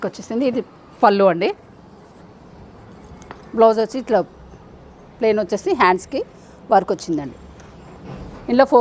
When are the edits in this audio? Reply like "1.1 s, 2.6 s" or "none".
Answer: none